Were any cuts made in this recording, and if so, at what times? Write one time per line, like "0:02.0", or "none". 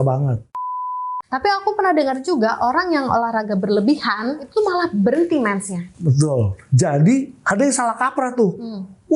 0:00.9
0:04.4
0:06.6
0:07.4